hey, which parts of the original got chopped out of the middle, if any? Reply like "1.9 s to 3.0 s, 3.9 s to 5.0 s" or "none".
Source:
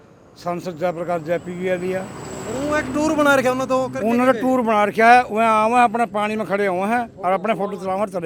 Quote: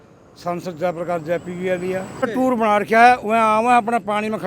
2.3 s to 4.4 s